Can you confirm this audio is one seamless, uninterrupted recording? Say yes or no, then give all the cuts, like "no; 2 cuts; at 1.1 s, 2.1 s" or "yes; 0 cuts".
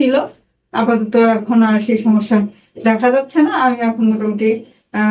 yes; 0 cuts